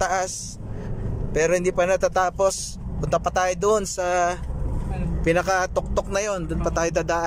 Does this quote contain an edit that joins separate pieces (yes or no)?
no